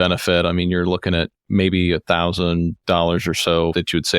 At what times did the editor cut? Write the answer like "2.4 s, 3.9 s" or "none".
2.8 s